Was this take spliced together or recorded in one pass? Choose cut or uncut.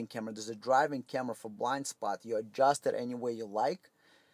uncut